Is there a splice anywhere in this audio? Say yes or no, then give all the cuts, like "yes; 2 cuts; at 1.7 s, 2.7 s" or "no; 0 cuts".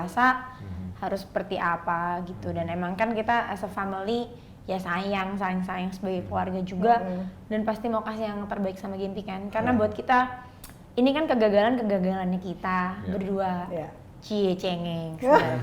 no; 0 cuts